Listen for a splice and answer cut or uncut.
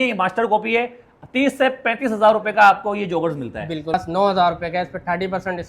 cut